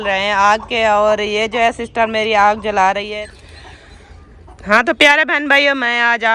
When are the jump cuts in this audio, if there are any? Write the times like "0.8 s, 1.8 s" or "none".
3.1 s